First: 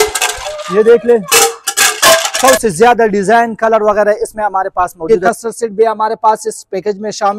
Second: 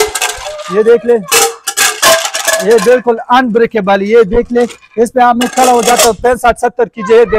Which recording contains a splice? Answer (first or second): first